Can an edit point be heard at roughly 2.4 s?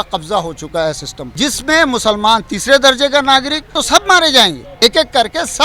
no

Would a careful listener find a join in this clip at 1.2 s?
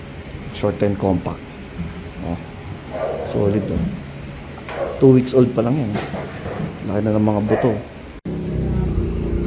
no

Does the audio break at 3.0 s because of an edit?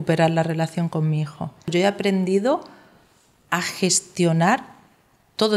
no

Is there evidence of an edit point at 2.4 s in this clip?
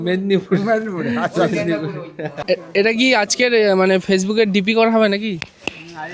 yes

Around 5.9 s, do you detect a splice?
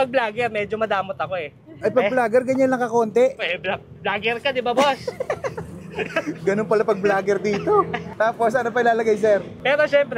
no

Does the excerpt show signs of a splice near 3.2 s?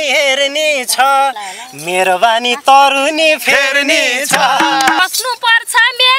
no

